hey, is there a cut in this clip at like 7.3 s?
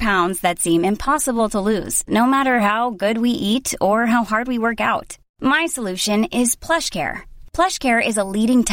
no; 0 cuts

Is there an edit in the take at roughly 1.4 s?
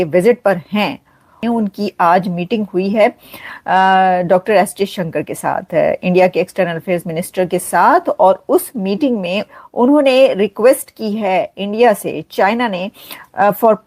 yes; 2 cuts; at 1.4 s, 9.5 s

